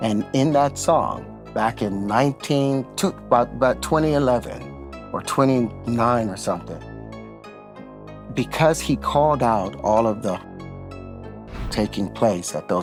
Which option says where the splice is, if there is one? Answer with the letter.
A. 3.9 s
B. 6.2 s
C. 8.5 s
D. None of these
D